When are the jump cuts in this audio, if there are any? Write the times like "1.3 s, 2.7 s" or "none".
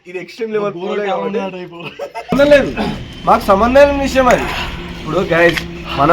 2.3 s

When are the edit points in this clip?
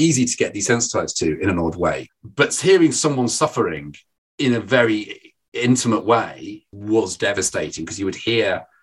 2.1 s, 6.7 s

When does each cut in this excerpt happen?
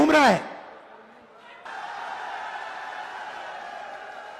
1.7 s

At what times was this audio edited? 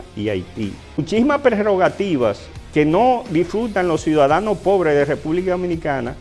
0.9 s

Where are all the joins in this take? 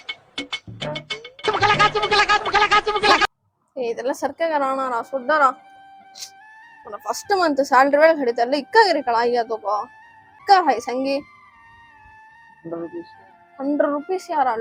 10.4 s

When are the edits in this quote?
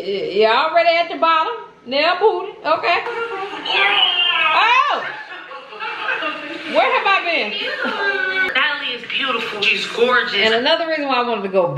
8.4 s

